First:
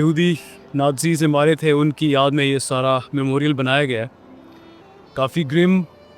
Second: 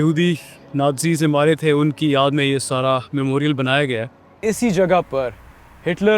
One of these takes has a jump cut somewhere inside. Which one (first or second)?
second